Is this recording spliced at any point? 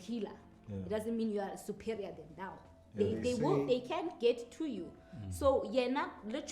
no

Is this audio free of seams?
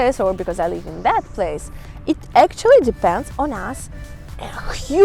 yes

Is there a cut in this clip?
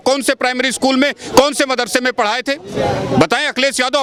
no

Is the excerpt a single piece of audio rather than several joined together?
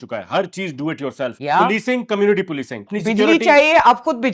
no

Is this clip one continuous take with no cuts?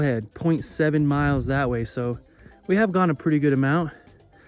yes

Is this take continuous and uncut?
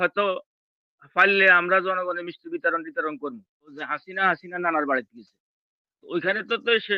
no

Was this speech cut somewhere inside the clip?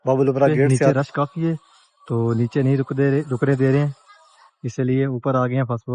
yes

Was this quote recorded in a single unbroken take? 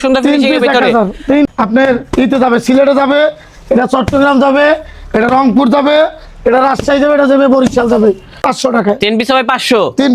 no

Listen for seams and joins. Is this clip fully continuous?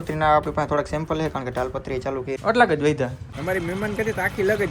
no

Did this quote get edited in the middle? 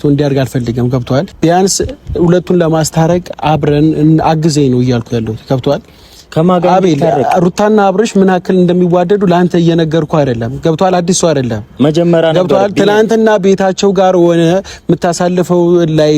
yes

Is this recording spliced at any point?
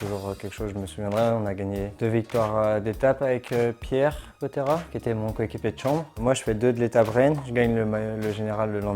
no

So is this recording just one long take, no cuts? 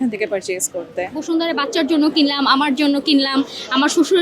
no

